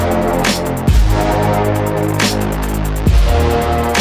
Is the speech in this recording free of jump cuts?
yes; 0 cuts

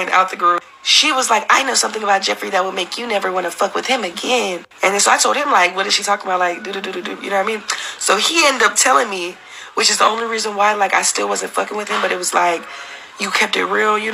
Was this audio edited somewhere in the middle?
no; 0 cuts

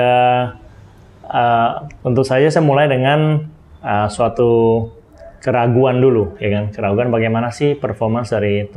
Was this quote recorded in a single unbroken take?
yes; 0 cuts

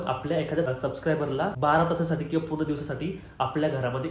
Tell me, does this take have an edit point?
yes; 1 cut; at 1.0 s

